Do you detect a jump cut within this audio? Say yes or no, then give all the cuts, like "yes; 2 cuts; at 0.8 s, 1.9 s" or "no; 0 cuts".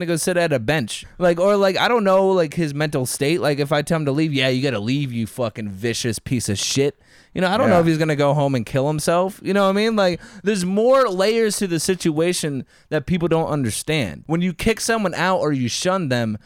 yes; 2 cuts; at 1.0 s, 14.2 s